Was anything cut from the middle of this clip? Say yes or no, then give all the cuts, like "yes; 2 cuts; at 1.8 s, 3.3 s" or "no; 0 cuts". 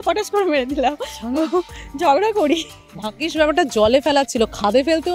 no; 0 cuts